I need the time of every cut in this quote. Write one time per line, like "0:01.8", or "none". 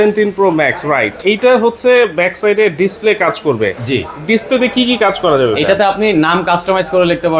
0:01.2